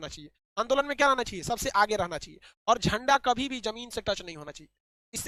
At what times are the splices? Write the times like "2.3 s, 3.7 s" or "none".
none

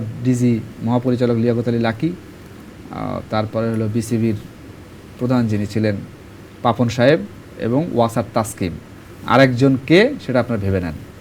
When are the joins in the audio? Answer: none

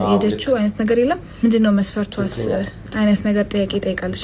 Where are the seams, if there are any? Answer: 3.1 s

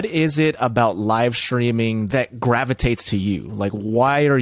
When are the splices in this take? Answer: 2.1 s

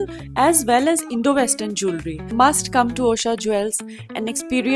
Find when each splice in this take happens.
2.3 s

